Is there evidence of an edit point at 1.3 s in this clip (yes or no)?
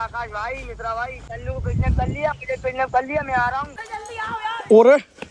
yes